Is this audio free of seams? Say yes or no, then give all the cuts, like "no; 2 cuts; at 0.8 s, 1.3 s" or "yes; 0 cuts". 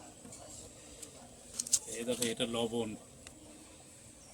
no; 1 cut; at 3.4 s